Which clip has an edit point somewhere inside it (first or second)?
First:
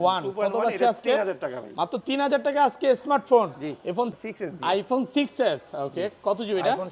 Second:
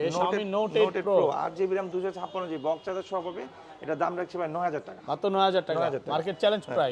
first